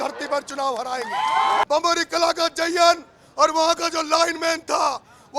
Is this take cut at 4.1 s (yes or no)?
no